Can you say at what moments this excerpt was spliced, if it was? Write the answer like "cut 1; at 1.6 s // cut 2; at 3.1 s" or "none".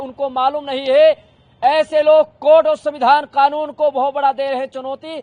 none